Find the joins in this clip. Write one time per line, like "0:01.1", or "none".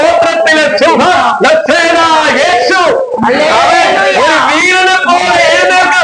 none